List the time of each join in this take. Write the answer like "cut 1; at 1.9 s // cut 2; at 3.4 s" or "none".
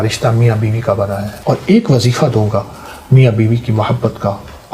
cut 1; at 1.3 s